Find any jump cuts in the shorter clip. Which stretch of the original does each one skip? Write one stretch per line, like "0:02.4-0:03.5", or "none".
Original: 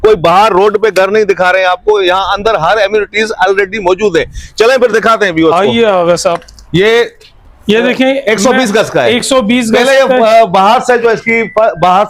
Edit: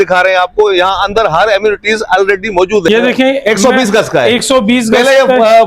0:04.2-0:07.7